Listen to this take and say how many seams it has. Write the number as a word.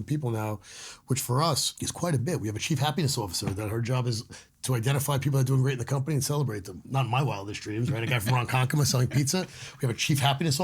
two